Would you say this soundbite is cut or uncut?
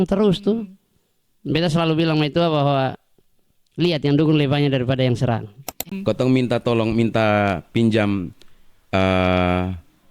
cut